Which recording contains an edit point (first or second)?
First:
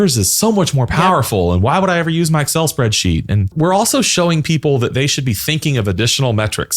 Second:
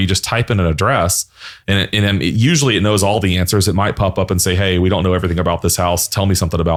first